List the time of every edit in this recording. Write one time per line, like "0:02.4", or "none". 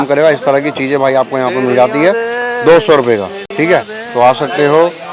none